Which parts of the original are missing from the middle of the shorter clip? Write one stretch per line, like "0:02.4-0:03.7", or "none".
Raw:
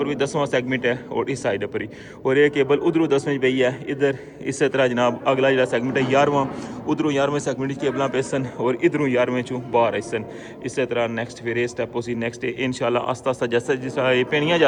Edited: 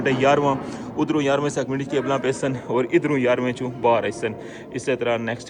none